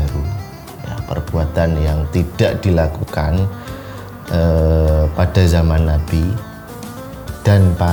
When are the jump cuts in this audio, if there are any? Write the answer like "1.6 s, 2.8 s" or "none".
none